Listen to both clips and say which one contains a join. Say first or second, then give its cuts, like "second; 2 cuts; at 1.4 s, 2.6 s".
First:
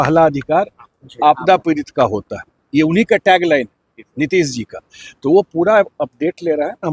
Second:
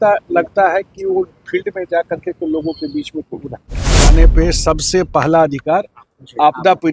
second; 1 cut; at 4.1 s